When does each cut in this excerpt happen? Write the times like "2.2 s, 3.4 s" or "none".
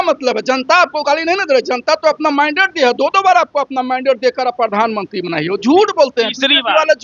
none